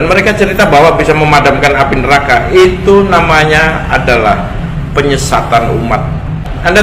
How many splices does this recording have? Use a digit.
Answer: 0